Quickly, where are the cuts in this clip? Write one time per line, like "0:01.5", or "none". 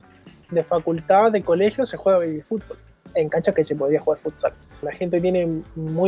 0:04.9